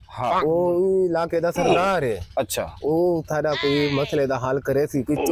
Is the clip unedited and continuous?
yes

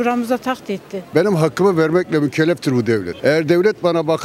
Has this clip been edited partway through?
yes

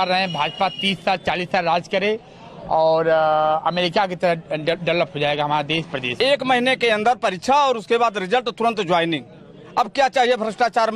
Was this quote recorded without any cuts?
no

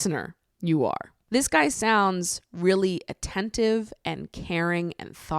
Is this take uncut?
no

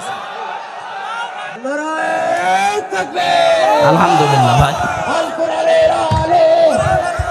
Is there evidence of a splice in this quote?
yes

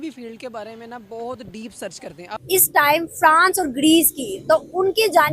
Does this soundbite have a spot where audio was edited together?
yes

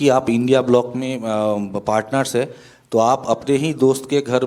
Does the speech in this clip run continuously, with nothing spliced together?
yes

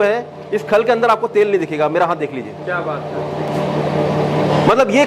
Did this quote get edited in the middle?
no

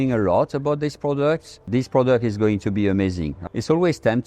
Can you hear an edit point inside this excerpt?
yes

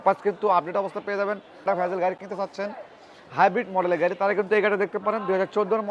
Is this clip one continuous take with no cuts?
no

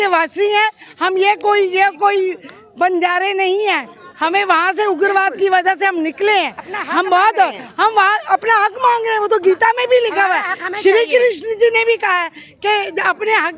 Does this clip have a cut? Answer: no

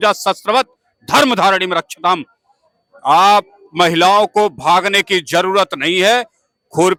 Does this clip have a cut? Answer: no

